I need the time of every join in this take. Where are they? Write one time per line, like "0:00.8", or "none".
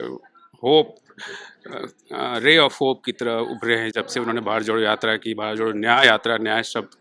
none

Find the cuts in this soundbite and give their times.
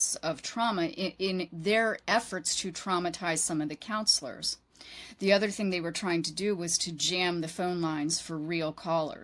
none

